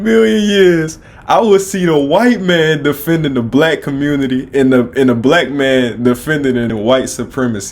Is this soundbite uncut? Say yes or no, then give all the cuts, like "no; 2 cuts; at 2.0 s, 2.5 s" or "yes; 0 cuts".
no; 1 cut; at 6.7 s